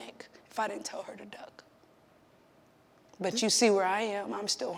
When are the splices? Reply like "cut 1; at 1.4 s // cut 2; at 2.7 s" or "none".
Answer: none